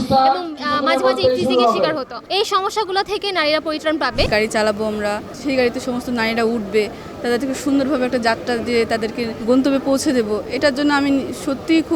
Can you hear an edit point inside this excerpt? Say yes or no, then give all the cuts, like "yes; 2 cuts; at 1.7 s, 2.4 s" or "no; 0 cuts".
yes; 4 cuts; at 2.2 s, 4.2 s, 5.3 s, 9.3 s